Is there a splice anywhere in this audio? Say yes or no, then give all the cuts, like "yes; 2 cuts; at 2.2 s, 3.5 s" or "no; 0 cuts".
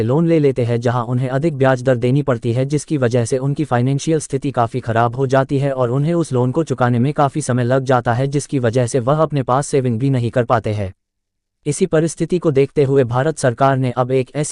yes; 1 cut; at 11.5 s